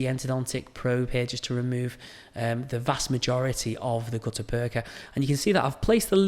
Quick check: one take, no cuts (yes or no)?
no